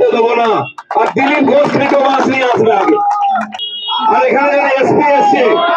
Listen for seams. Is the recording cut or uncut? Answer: cut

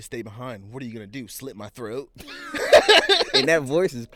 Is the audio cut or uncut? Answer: uncut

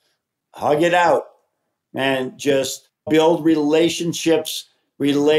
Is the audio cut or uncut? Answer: cut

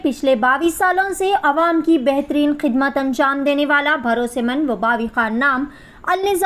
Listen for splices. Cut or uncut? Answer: uncut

